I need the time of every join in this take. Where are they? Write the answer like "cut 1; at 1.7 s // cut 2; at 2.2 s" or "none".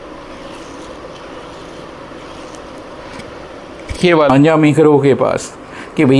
cut 1; at 4.3 s